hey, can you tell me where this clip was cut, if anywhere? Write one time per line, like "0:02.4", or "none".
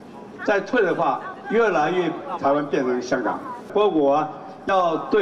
0:03.7